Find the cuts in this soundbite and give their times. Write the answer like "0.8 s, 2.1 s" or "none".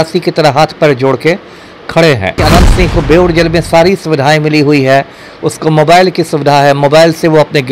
2.4 s